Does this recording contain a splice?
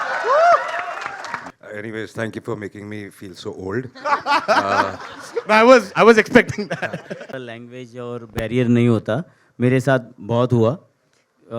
yes; 2 cuts; at 1.5 s, 7.2 s

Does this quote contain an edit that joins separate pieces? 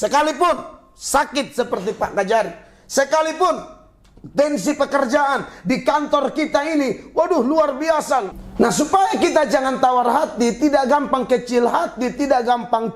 yes; 1 cut; at 8.4 s

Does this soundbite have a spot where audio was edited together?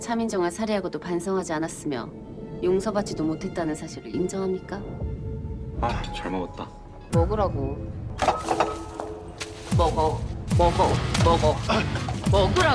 no; 0 cuts

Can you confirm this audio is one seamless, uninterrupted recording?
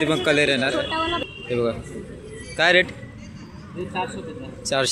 no; 1 cut; at 1.2 s

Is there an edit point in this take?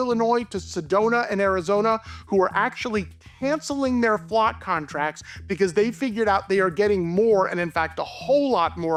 no; 0 cuts

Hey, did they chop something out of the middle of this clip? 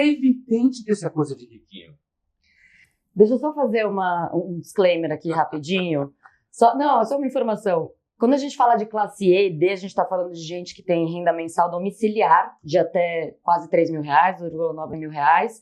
no; 0 cuts

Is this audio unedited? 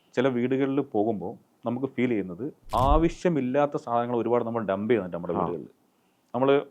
no; 1 cut; at 2.6 s

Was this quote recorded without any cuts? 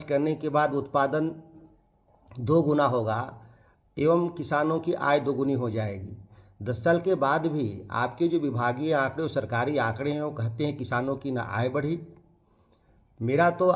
yes; 0 cuts

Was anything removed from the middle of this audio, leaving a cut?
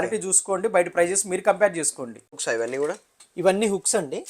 yes; 1 cut; at 2.4 s

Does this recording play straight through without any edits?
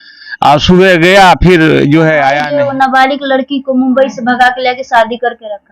no; 1 cut; at 2.4 s

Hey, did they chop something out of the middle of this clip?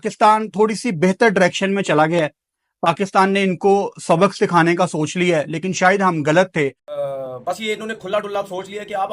yes; 1 cut; at 6.9 s

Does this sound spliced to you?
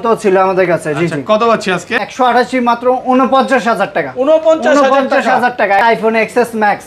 yes; 2 cuts; at 2.0 s, 5.9 s

